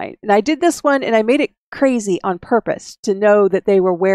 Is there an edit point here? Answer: yes; 1 cut; at 1.6 s

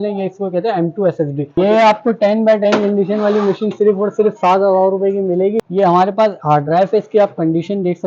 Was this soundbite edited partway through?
yes; 2 cuts; at 1.6 s, 5.6 s

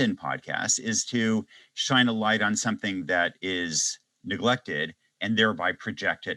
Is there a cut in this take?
no; 0 cuts

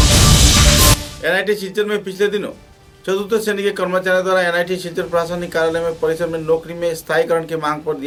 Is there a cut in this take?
no; 0 cuts

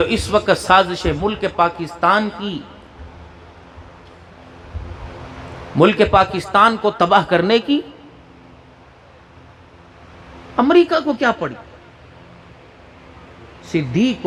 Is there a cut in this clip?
no; 0 cuts

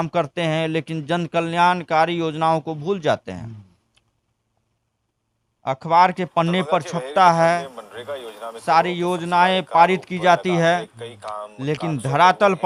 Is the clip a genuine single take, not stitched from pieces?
yes; 0 cuts

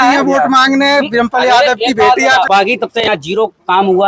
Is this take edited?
yes; 1 cut; at 2.5 s

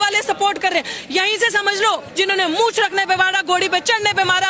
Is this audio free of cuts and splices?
no; 1 cut; at 2.1 s

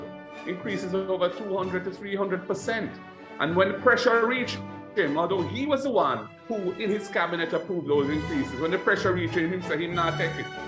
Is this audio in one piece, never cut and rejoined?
yes; 0 cuts

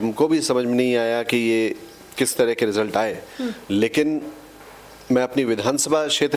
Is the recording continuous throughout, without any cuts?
yes; 0 cuts

